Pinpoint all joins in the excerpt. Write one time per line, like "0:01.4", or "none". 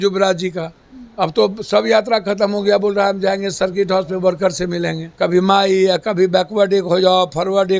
0:05.0